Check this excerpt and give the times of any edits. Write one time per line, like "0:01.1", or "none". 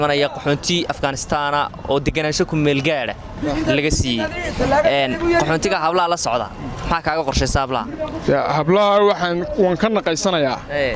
none